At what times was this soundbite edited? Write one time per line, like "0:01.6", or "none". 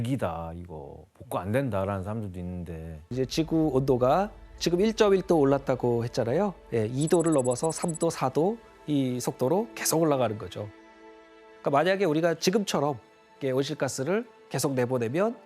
0:03.1